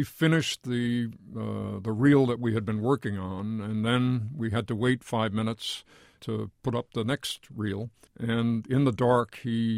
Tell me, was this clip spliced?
yes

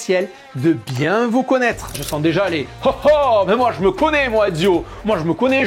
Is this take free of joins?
no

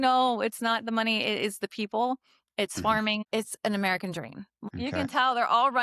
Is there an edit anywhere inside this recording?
yes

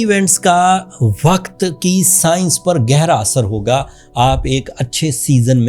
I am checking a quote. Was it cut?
no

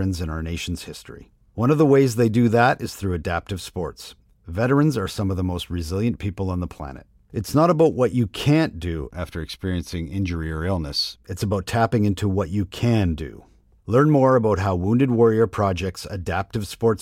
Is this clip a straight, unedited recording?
yes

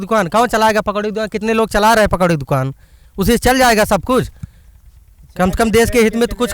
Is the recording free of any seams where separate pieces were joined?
yes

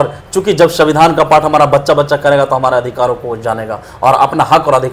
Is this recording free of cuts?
yes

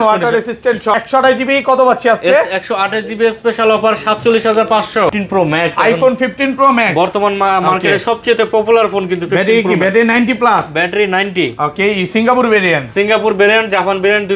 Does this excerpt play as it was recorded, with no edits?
no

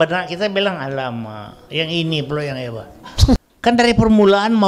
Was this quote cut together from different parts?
yes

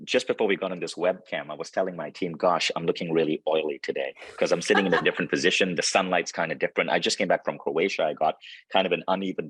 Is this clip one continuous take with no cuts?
yes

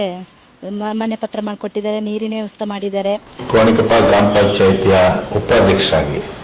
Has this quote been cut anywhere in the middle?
yes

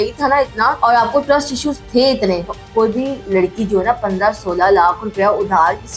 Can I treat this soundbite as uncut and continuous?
no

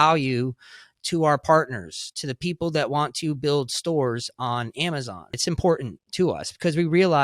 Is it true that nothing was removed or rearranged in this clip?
no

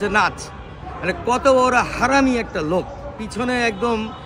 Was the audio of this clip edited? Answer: yes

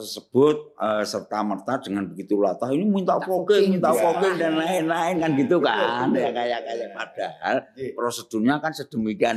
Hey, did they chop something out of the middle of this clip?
no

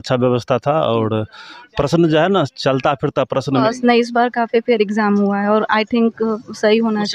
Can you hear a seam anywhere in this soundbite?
yes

